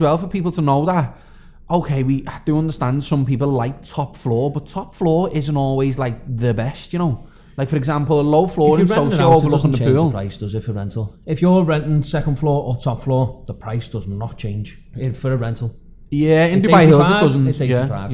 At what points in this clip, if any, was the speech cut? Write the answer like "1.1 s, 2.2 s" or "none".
none